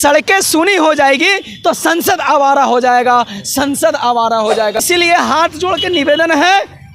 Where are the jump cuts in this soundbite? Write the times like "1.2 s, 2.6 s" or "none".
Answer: 4.8 s